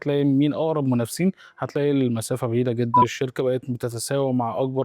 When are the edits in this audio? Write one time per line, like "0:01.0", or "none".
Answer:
0:03.0